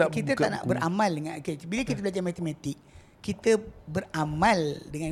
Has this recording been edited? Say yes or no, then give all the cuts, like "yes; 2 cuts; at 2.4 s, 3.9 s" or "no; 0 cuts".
no; 0 cuts